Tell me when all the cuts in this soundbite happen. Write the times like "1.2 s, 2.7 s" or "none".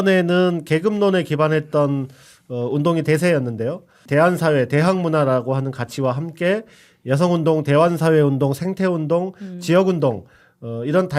4.0 s